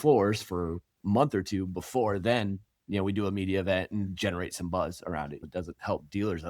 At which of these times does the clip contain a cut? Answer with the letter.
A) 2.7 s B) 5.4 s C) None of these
B